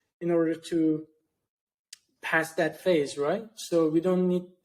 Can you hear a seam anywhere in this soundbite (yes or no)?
no